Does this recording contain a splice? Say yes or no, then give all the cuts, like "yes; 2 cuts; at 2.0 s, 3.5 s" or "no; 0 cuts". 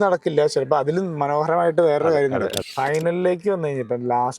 yes; 1 cut; at 2.6 s